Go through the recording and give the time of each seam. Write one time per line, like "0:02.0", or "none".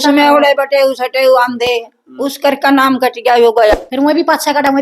0:03.7